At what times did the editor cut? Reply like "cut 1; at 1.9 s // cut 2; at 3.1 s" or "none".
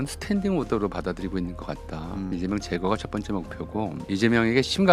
cut 1; at 2.3 s // cut 2; at 4.0 s